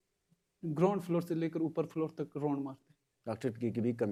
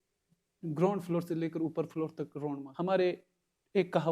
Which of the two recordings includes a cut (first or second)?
second